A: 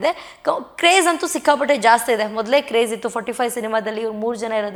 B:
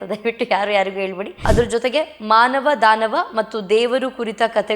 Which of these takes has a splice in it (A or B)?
B